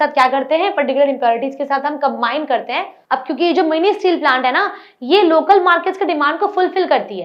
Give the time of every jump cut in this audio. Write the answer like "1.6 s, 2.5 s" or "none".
2.9 s